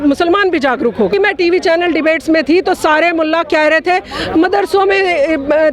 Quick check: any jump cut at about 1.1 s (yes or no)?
yes